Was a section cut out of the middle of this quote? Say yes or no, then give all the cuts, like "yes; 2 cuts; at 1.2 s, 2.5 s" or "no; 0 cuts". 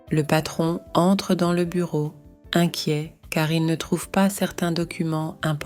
no; 0 cuts